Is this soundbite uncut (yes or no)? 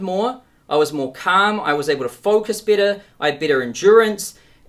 yes